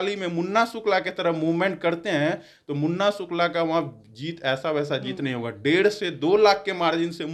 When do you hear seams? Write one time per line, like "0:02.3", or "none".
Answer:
none